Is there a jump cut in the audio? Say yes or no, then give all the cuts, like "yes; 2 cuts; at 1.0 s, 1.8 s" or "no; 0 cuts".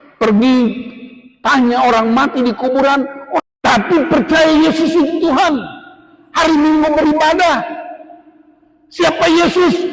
yes; 1 cut; at 3.4 s